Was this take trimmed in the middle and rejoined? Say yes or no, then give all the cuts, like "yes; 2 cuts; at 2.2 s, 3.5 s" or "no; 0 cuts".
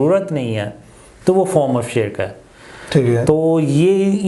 no; 0 cuts